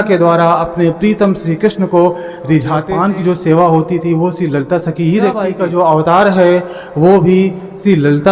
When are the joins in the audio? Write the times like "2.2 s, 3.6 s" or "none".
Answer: 2.9 s, 5.4 s